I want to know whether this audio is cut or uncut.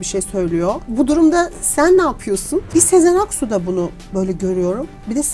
cut